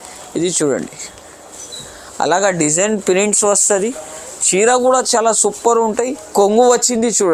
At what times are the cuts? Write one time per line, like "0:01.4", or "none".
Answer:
0:06.3